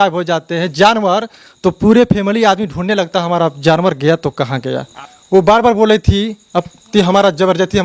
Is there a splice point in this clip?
yes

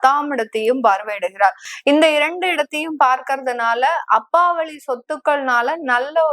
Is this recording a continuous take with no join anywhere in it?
no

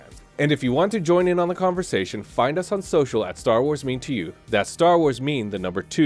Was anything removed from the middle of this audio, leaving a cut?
no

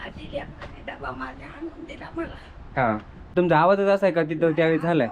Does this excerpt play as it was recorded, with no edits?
no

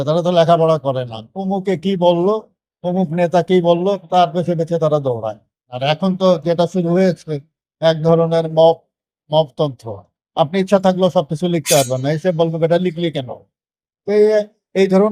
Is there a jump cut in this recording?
yes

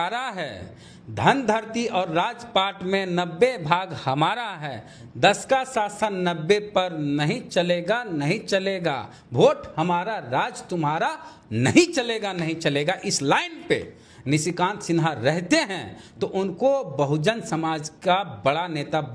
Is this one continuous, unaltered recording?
yes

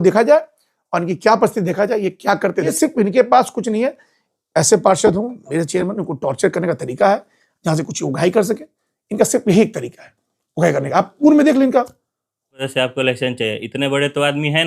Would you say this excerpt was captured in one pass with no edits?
no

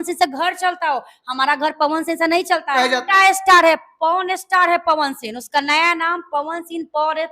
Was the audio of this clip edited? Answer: yes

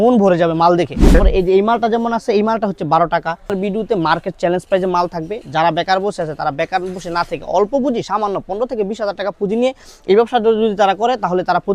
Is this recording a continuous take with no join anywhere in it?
no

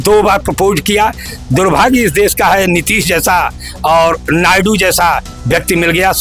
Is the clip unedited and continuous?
yes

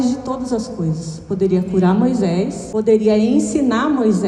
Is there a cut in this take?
yes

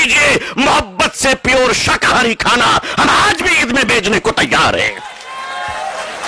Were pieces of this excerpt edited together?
no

